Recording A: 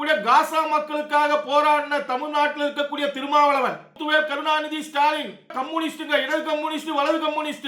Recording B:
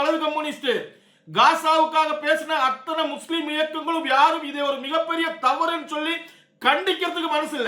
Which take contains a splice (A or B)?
A